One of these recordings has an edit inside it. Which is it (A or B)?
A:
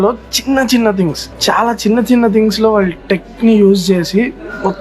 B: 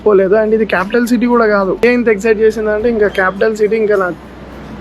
B